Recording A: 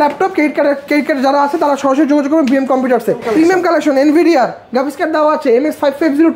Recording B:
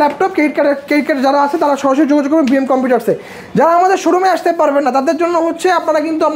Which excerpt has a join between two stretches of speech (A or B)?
A